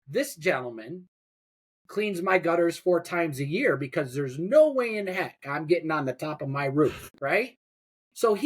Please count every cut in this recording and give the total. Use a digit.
1